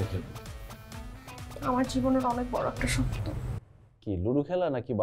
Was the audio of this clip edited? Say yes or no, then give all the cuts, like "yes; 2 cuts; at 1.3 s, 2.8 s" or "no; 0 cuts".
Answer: no; 0 cuts